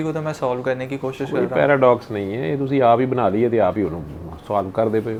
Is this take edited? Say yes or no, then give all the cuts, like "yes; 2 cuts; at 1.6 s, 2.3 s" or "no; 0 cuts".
no; 0 cuts